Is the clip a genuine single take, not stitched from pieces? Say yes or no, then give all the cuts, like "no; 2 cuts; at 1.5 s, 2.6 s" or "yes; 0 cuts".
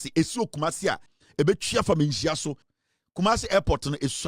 no; 2 cuts; at 1.1 s, 2.7 s